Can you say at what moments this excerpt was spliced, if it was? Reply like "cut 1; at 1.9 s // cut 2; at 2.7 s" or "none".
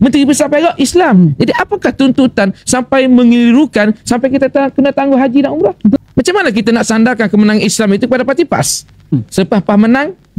cut 1; at 6.0 s // cut 2; at 9.2 s